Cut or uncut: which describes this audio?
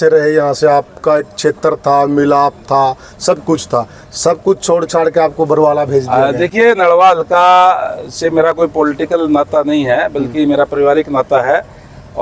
uncut